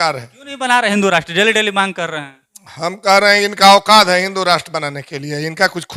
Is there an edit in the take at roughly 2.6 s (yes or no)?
no